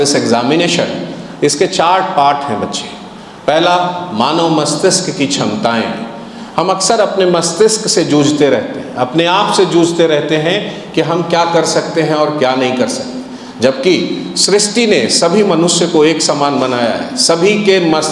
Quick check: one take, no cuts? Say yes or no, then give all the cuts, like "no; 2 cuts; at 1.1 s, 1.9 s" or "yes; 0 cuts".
yes; 0 cuts